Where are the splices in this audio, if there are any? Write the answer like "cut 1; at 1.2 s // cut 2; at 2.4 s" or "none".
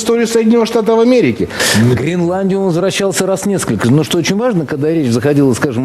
cut 1; at 1.5 s

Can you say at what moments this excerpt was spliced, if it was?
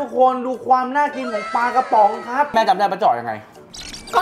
cut 1; at 2.5 s

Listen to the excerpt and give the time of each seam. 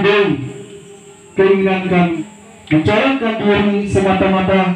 cut 1; at 2.2 s

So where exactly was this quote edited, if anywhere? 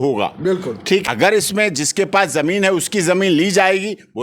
cut 1; at 1.0 s

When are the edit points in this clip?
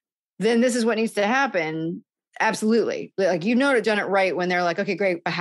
cut 1; at 3.8 s

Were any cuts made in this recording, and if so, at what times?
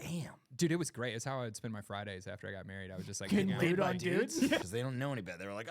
cut 1; at 4.6 s

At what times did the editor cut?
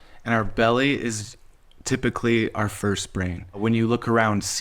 cut 1; at 3.6 s

